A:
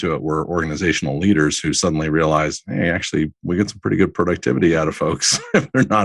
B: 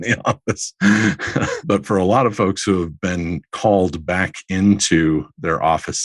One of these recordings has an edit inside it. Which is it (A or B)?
B